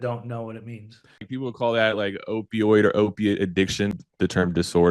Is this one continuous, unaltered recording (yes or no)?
no